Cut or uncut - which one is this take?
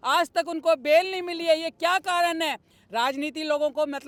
uncut